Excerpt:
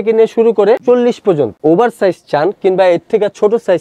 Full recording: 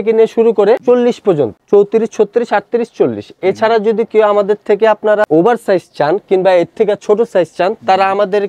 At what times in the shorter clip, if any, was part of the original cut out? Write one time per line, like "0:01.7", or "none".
0:01.6